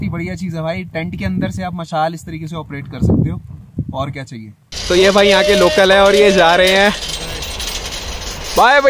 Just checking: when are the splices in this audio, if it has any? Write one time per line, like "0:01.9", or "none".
0:04.7